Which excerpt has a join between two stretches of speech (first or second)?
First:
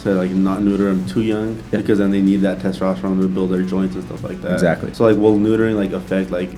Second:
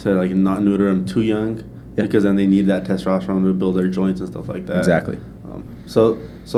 first